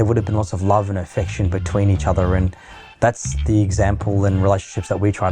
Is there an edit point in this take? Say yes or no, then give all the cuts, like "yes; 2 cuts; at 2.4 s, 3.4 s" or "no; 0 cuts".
no; 0 cuts